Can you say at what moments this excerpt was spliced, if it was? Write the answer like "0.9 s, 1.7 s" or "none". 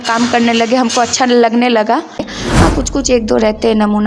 2.3 s